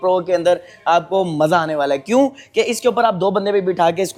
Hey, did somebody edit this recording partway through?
no; 0 cuts

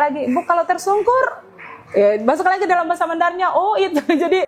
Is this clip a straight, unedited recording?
yes; 0 cuts

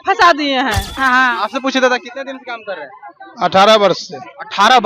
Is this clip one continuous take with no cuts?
no; 1 cut; at 0.9 s

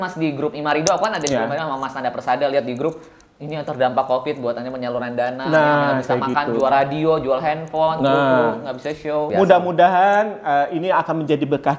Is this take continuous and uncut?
no; 1 cut; at 9.3 s

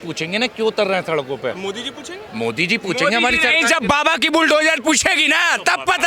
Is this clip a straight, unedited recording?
yes; 0 cuts

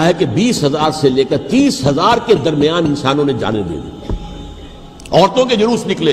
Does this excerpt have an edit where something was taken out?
no; 0 cuts

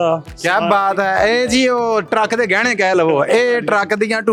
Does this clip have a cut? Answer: no; 0 cuts

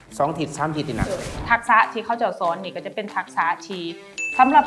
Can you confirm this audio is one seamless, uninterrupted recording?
no; 1 cut; at 1.4 s

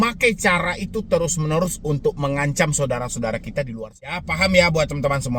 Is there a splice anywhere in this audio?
yes; 1 cut; at 4.2 s

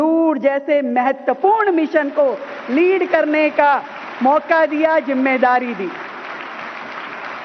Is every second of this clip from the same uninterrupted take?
no; 1 cut; at 1.6 s

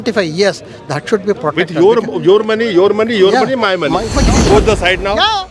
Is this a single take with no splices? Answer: no; 1 cut; at 4.1 s

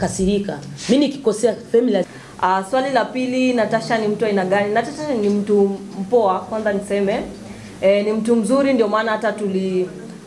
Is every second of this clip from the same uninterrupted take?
no; 1 cut; at 2.1 s

